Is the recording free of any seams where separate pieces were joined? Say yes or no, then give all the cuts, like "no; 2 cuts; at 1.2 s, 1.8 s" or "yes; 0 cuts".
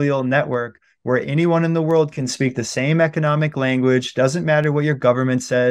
yes; 0 cuts